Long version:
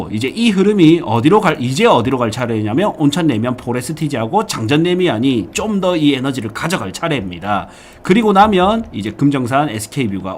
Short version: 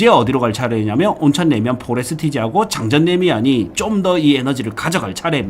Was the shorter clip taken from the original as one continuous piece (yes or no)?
yes